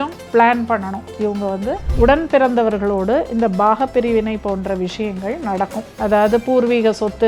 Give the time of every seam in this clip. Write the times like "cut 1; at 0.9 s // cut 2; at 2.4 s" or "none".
cut 1; at 1.9 s